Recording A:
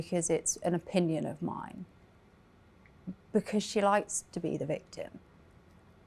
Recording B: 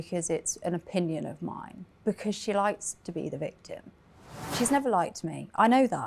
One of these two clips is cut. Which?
B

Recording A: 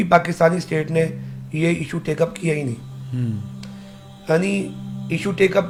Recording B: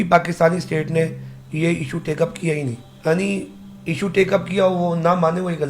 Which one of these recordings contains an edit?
B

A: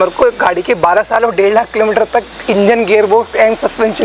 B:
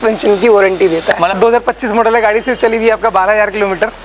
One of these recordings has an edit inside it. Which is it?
B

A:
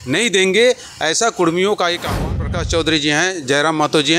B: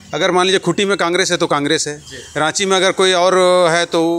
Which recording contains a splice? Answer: A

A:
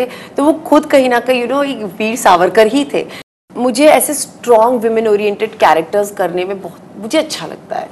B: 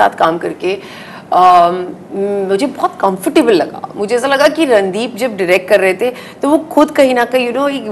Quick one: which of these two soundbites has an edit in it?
A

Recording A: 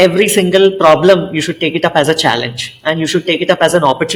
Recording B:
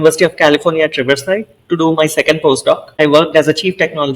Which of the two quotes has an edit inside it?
B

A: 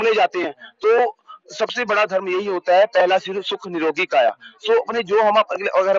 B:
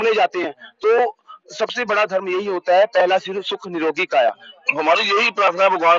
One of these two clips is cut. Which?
B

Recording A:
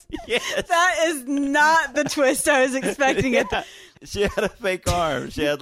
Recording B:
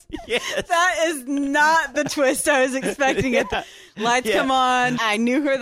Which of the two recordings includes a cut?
A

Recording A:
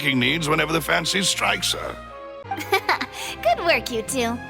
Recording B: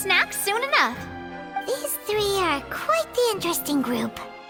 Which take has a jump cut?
A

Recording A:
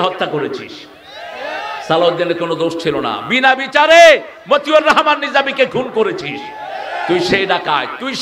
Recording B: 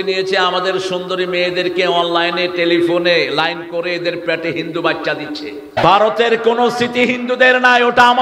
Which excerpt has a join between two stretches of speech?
B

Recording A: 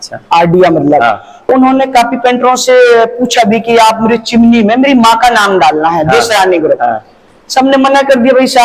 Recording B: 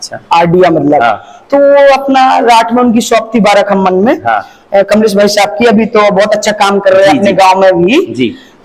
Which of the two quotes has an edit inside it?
A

